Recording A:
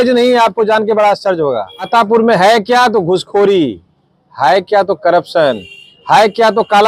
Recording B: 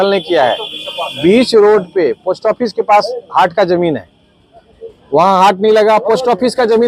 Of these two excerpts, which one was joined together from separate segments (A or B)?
A